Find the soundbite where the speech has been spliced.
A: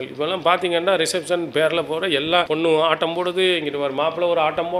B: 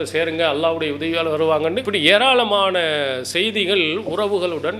B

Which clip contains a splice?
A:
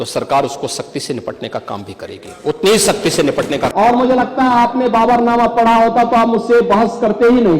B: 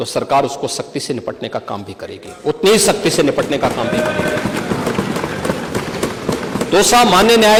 A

